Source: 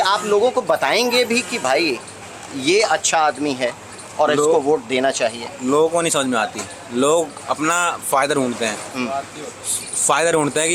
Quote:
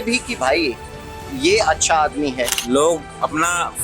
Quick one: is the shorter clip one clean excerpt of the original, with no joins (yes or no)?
no